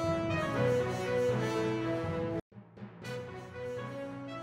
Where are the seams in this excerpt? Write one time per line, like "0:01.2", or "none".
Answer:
0:01.0
0:02.1